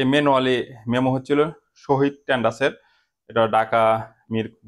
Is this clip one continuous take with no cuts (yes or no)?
yes